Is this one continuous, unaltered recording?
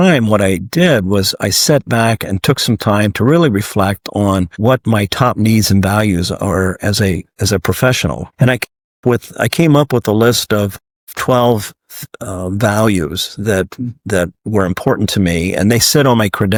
yes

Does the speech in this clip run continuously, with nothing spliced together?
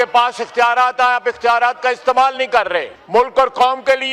no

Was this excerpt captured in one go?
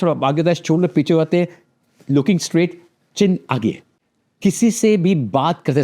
no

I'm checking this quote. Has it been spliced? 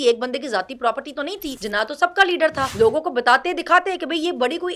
yes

